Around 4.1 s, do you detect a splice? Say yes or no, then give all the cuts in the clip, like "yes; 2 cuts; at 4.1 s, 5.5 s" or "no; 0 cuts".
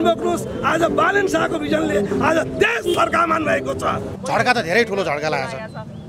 yes; 1 cut; at 4.1 s